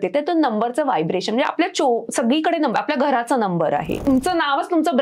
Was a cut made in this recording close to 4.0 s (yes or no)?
yes